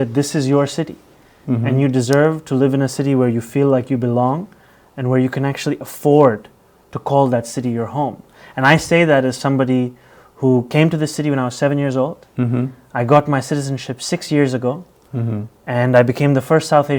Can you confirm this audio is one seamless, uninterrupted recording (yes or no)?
yes